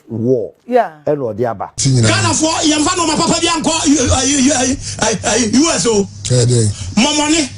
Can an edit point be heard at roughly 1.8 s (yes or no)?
yes